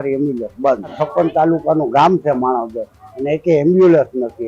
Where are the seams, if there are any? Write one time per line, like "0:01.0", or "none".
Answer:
0:00.9